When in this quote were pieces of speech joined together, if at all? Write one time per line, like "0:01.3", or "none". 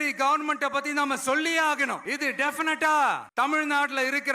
0:02.0

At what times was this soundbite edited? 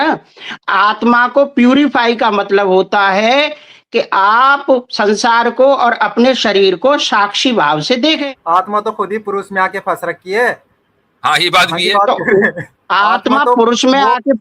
0:08.2
0:12.7

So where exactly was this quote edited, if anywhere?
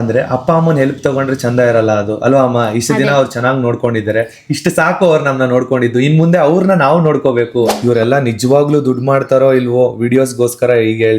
0:07.8

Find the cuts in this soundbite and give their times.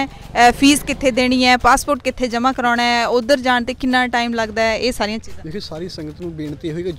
none

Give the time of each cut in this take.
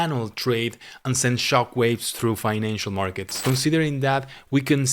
0:03.3

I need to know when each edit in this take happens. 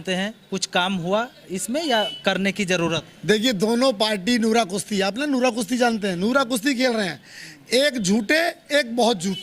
none

